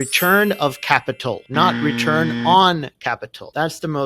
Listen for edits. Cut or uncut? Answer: uncut